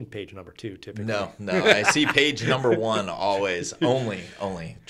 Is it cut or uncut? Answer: uncut